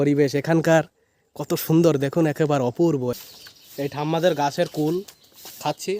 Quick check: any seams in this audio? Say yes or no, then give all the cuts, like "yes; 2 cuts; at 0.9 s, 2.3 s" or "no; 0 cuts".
yes; 1 cut; at 3.1 s